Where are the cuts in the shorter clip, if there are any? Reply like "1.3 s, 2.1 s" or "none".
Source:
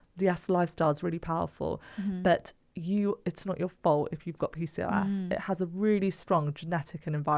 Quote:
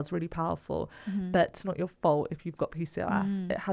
1.6 s